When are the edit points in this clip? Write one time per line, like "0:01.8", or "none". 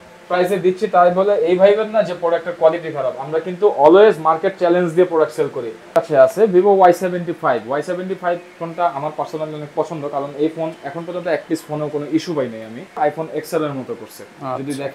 0:05.9
0:13.0